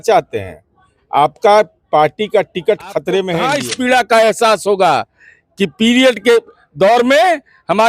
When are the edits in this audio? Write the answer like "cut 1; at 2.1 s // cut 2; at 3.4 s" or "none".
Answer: cut 1; at 3.5 s